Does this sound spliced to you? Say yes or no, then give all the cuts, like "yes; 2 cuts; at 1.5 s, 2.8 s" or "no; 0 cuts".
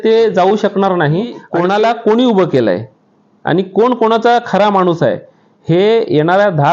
yes; 1 cut; at 1.4 s